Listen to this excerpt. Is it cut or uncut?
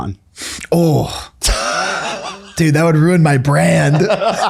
cut